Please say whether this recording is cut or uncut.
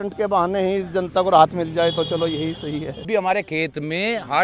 cut